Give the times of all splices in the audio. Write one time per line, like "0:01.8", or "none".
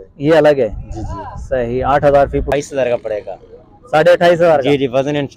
0:02.5